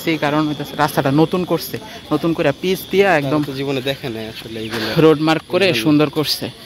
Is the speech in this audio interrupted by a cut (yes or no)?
no